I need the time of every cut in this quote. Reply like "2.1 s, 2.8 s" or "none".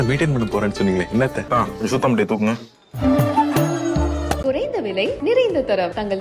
none